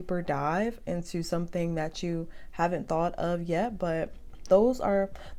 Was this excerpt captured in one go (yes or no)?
yes